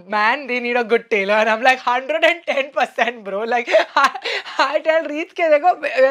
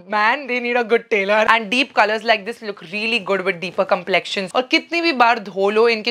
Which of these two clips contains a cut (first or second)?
second